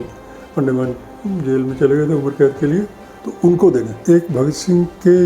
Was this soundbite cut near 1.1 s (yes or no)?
no